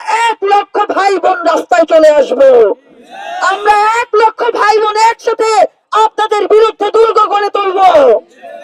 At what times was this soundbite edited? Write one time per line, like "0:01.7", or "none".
none